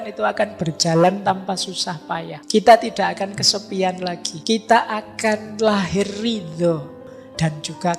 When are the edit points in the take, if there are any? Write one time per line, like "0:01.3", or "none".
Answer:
0:02.3
0:04.3
0:07.0